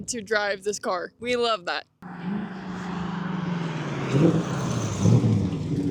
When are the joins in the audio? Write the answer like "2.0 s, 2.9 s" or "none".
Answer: none